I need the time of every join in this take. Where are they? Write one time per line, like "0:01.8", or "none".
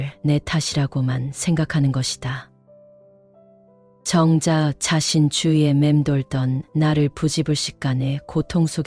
none